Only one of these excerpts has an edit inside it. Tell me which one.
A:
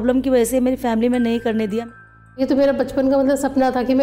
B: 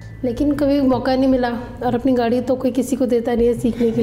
A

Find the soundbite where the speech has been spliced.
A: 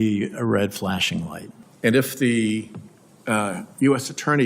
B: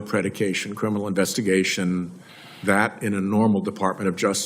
A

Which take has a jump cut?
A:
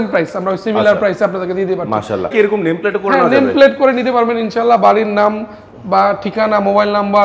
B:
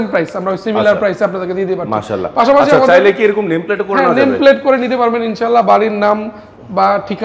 A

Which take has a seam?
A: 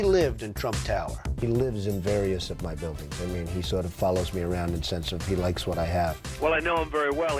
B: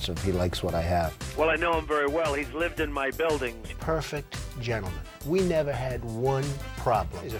A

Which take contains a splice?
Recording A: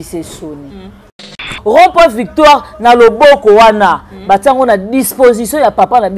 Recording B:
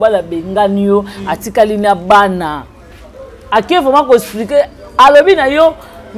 A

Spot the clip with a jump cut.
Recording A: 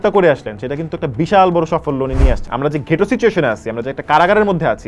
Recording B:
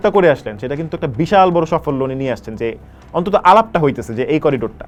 A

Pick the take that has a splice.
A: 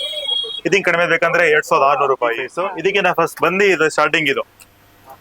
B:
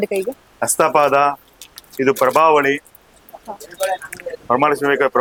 A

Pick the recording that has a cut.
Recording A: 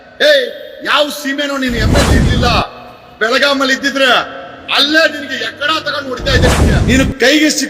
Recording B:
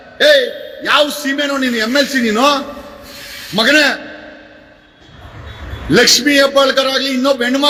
A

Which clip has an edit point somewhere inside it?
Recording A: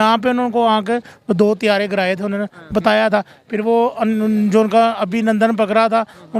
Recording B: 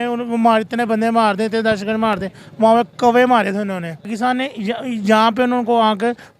B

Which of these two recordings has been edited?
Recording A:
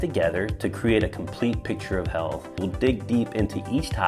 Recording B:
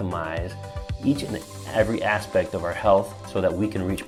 A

